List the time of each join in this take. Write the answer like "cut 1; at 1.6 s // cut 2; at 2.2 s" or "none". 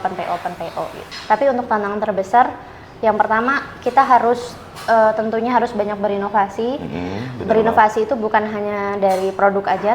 cut 1; at 1.0 s

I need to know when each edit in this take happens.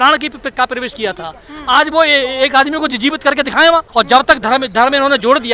cut 1; at 3.9 s

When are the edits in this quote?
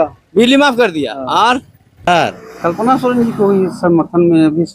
cut 1; at 2.1 s

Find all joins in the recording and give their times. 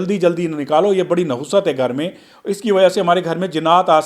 none

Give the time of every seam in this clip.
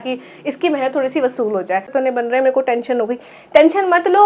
cut 1; at 1.9 s

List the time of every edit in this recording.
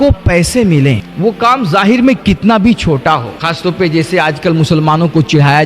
cut 1; at 1.1 s // cut 2; at 3.3 s

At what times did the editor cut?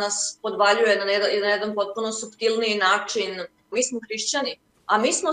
cut 1; at 3.7 s

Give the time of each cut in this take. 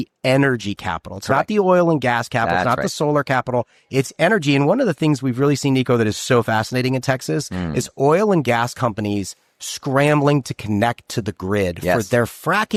none

